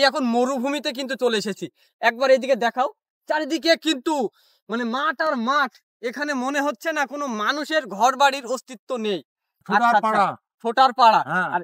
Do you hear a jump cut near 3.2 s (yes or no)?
no